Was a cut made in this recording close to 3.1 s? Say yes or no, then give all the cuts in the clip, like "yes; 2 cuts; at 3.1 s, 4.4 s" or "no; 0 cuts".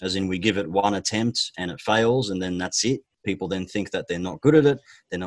yes; 1 cut; at 3.1 s